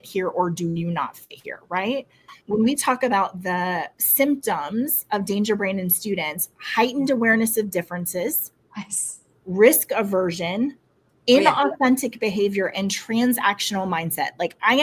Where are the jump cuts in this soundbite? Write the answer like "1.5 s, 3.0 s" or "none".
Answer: 2.3 s